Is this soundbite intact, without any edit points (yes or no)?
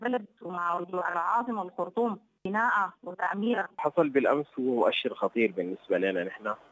no